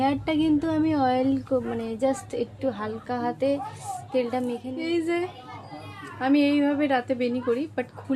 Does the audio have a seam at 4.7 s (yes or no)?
yes